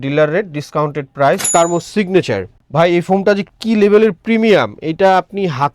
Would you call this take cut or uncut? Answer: cut